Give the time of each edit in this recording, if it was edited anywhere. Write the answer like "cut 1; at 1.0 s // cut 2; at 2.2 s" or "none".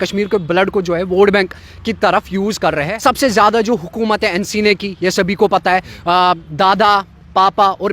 cut 1; at 2.9 s